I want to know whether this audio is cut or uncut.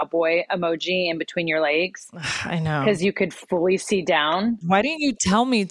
cut